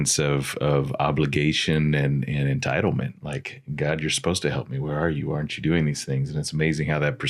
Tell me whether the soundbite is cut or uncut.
uncut